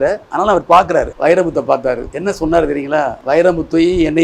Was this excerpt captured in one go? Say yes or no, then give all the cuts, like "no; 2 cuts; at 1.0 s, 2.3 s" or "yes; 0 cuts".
no; 3 cuts; at 1.1 s, 2.1 s, 3.2 s